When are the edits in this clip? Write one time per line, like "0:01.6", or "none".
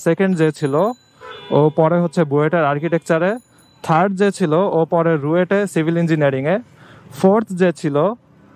none